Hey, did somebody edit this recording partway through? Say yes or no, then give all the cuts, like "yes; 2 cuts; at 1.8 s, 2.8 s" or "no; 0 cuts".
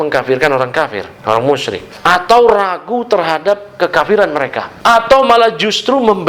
yes; 3 cuts; at 1.1 s, 1.9 s, 4.6 s